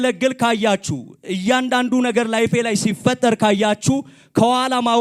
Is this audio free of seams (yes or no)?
yes